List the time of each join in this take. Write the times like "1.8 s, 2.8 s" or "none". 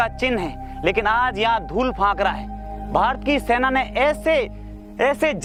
none